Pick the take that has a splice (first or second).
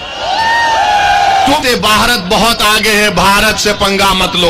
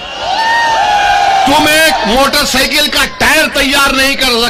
first